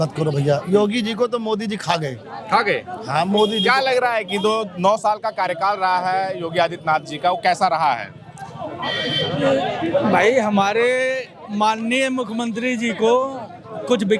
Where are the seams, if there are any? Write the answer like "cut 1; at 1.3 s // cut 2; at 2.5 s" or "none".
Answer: none